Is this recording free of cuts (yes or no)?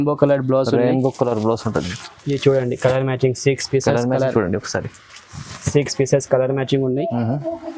yes